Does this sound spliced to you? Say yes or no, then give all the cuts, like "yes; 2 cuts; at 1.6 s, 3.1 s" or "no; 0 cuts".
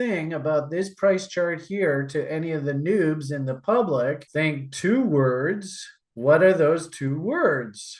no; 0 cuts